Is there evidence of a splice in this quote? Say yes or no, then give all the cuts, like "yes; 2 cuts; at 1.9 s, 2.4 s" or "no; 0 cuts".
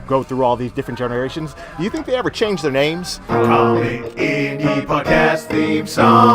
yes; 1 cut; at 3.1 s